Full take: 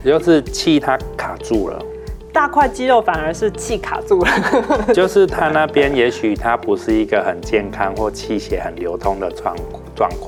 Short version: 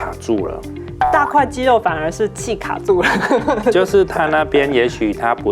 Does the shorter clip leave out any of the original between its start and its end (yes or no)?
no